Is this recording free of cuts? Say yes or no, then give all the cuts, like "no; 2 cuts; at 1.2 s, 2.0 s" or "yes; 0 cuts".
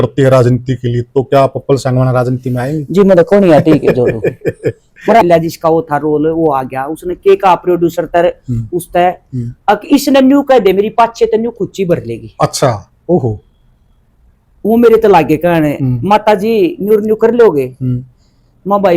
no; 1 cut; at 5.2 s